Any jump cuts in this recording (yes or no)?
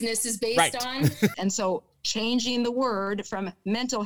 yes